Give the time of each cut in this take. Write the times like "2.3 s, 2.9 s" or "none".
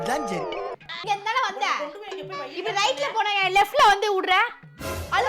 0.9 s